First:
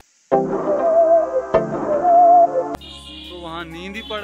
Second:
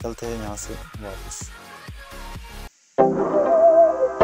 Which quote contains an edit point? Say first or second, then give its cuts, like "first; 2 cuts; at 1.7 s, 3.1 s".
first; 1 cut; at 2.5 s